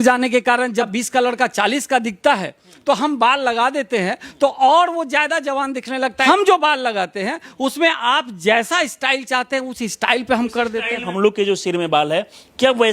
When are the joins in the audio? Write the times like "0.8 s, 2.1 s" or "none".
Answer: 0.9 s, 6.2 s, 11.1 s